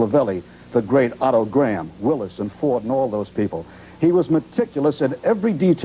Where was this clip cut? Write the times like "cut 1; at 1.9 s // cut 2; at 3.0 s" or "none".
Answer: cut 1; at 4.3 s